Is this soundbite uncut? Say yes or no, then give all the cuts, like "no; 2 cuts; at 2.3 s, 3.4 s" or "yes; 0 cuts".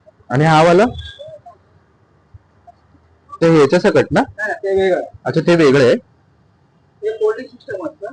no; 1 cut; at 3.4 s